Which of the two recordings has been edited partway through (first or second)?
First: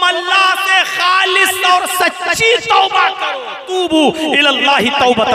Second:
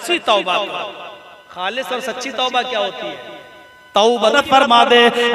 second